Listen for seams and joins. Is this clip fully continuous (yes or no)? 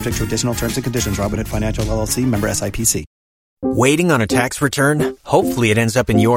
no